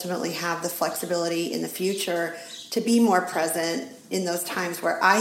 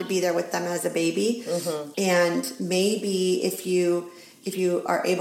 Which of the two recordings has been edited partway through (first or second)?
second